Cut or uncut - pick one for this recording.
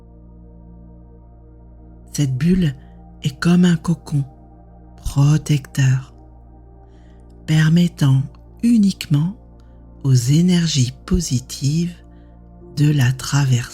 cut